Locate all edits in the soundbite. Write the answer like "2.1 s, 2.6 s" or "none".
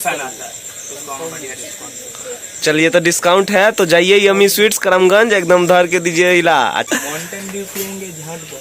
none